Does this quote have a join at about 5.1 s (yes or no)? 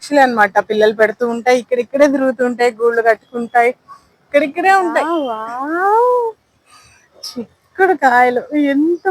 yes